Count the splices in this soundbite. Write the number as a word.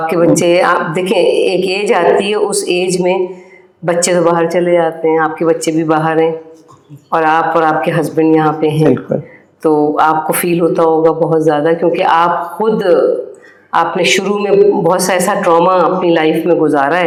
zero